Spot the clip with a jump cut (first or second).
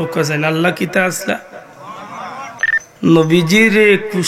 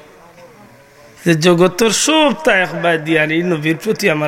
first